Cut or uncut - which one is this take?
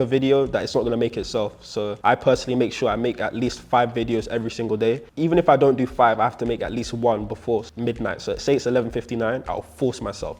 uncut